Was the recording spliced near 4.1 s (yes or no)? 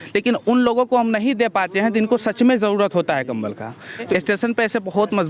yes